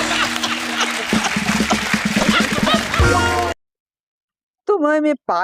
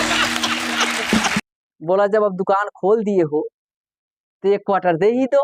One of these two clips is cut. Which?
second; 1 cut; at 1.4 s

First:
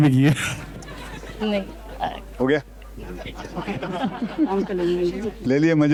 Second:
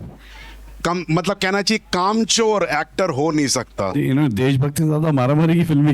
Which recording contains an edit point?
second; 1 cut; at 3.9 s

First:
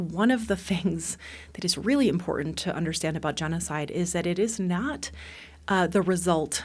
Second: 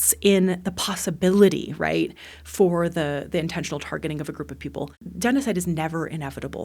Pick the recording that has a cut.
second; 1 cut; at 5.1 s

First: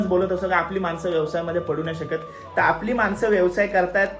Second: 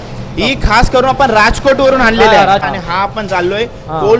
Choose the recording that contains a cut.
second; 1 cut; at 2.6 s

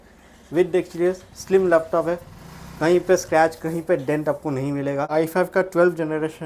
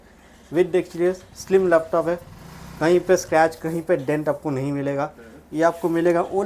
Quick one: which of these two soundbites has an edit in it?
first; 1 cut; at 5.1 s

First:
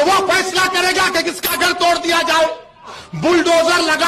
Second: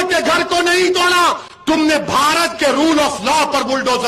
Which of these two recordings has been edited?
first; 1 cut; at 3.0 s

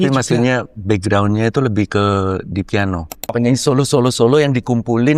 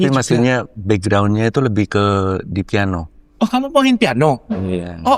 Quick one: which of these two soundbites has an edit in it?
first; 1 cut; at 3.3 s

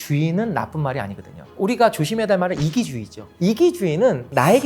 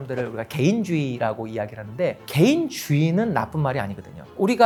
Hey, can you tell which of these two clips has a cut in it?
first; 1 cut; at 3.2 s

